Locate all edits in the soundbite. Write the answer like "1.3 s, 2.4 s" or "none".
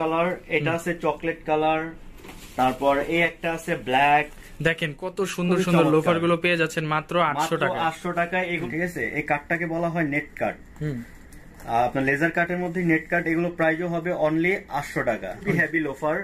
8.6 s, 15.4 s